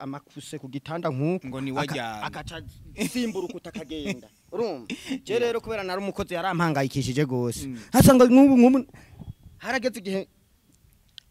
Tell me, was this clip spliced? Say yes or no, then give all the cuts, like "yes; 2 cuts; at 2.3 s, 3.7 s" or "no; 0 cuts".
no; 0 cuts